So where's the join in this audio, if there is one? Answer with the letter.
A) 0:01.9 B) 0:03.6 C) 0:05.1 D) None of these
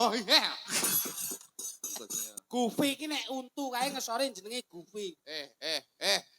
A